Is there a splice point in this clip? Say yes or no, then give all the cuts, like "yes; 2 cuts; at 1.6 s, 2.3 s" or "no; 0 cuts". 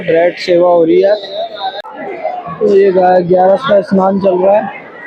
yes; 1 cut; at 1.6 s